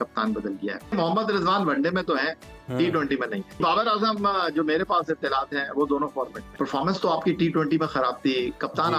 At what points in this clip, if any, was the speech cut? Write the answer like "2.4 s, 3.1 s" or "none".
0.9 s, 3.6 s, 6.4 s